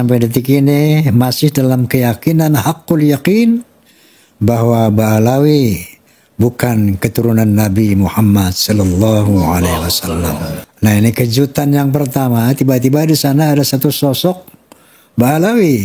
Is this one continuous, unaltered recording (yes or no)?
no